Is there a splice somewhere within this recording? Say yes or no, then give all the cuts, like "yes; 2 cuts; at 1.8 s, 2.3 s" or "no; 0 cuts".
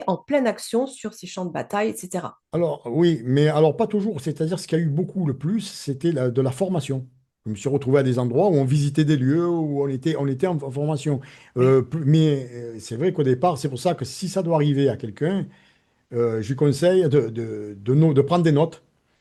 no; 0 cuts